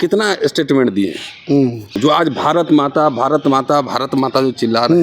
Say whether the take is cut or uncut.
cut